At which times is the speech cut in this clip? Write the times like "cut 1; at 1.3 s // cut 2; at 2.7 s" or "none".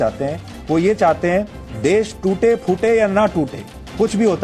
none